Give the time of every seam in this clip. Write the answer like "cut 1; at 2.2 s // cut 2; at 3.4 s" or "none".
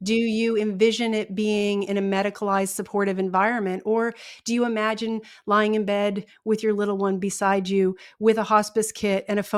none